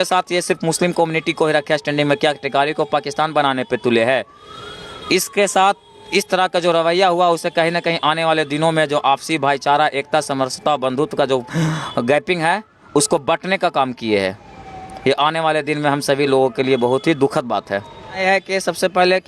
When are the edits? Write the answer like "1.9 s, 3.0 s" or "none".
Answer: 18.2 s